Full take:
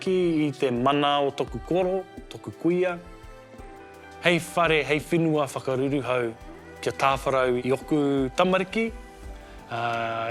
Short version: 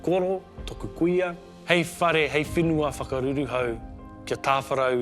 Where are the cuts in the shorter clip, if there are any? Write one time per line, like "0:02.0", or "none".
0:01.5